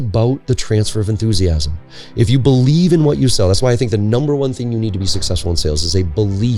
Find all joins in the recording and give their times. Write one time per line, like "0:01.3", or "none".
none